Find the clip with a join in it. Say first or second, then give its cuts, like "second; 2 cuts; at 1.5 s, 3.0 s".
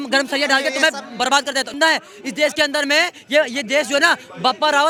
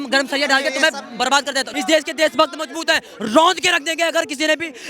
second; 1 cut; at 1.7 s